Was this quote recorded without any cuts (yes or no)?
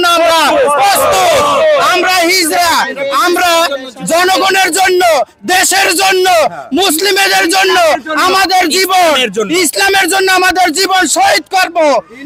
yes